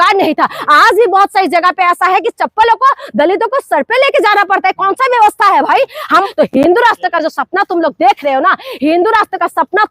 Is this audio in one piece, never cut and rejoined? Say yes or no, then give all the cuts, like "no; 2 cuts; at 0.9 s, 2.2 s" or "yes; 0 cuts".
no; 1 cut; at 6.3 s